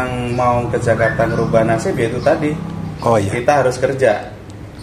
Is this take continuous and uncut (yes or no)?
yes